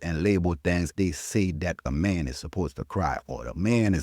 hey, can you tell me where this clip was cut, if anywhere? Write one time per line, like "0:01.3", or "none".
0:00.9
0:01.8